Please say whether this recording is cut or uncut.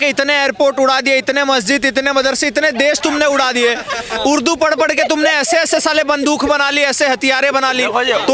uncut